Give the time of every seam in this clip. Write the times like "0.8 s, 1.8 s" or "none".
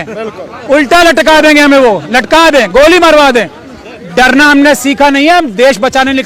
none